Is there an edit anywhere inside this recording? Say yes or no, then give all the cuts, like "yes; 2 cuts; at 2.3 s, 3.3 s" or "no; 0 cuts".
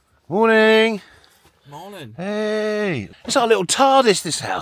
yes; 1 cut; at 3.1 s